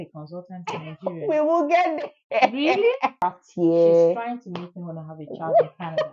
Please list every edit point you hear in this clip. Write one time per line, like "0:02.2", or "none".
0:03.2